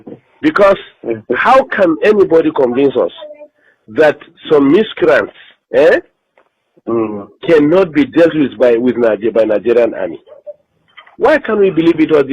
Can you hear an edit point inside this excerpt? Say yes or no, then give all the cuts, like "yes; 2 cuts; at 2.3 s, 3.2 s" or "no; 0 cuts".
no; 0 cuts